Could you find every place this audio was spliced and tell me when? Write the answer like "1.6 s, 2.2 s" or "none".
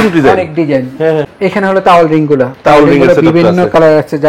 1.3 s